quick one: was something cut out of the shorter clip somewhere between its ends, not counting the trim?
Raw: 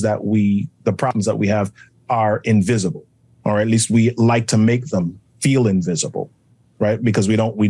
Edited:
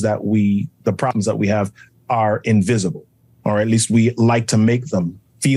no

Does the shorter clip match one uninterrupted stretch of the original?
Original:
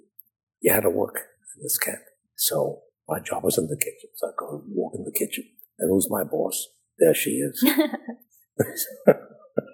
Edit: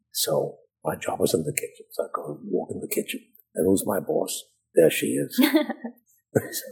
yes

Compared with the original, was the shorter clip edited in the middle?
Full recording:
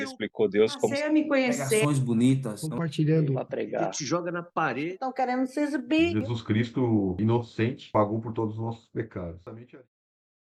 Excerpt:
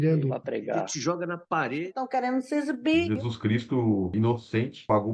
no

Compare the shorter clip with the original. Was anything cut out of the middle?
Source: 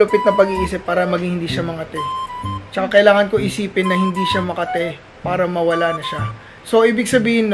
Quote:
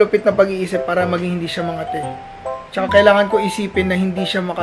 no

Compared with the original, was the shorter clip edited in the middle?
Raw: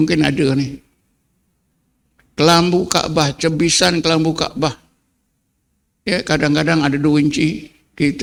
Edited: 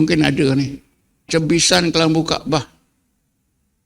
yes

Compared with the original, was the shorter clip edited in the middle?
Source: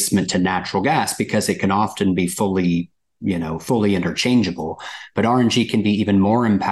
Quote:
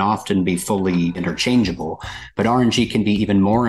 yes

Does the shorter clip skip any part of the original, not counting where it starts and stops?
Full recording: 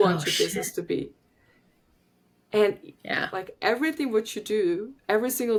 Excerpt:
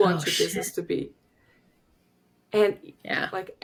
no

